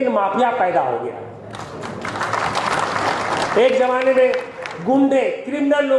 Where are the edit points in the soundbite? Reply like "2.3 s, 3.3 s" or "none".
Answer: none